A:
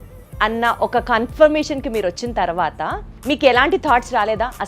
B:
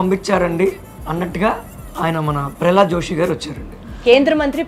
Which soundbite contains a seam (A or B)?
A